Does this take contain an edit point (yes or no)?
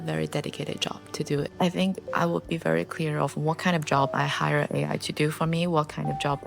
yes